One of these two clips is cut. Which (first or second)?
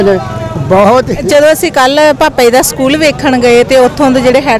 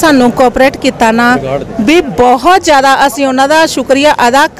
first